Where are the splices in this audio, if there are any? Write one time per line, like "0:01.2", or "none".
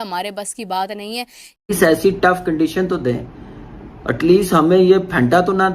0:01.7